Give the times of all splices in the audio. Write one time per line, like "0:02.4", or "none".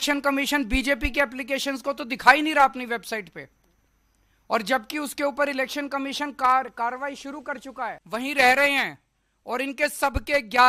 0:08.0